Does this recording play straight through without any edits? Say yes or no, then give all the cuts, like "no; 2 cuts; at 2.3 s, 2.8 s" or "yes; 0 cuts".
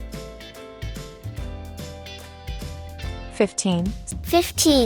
no; 1 cut; at 3.4 s